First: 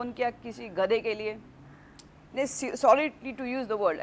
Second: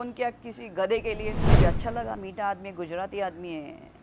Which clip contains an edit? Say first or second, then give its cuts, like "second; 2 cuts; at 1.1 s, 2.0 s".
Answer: second; 1 cut; at 1.5 s